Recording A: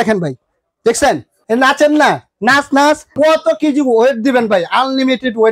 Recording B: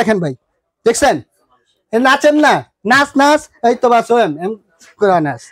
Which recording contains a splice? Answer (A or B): A